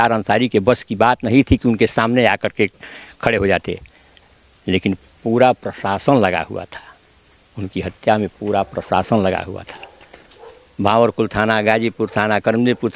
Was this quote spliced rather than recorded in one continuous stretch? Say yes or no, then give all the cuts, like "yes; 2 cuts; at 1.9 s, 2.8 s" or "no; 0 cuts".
no; 0 cuts